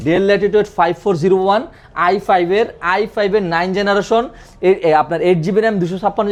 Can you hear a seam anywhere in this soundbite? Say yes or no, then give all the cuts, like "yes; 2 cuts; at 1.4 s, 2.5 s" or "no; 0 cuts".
no; 0 cuts